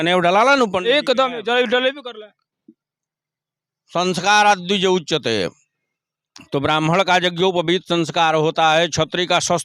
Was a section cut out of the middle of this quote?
no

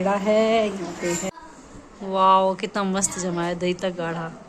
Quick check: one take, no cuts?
no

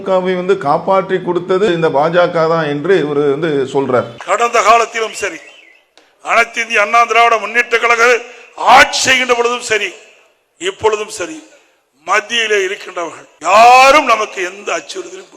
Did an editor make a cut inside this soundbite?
yes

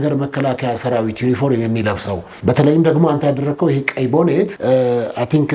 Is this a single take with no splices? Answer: no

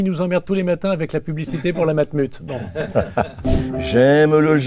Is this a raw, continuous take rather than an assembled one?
no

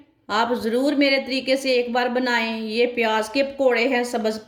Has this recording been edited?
no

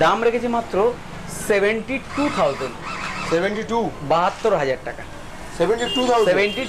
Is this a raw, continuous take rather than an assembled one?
yes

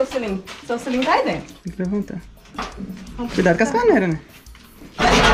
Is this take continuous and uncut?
yes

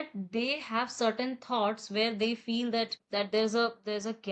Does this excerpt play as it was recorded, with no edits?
no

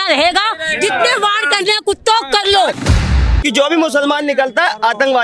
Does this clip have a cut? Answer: yes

